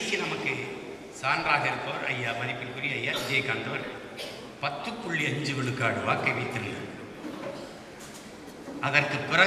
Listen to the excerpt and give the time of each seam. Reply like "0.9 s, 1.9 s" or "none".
none